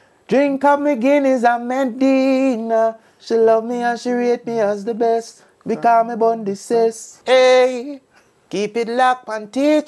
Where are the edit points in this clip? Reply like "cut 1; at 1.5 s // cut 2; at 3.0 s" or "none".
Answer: cut 1; at 7.1 s